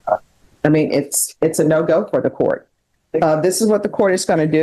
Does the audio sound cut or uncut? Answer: uncut